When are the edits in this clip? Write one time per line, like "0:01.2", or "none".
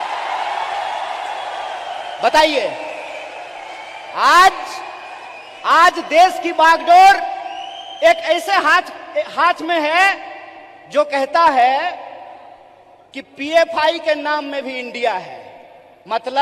none